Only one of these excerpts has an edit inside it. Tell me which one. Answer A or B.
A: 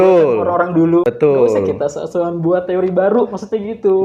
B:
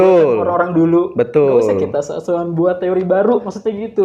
A